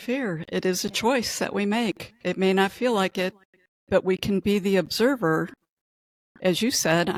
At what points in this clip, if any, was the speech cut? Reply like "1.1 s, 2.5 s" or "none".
none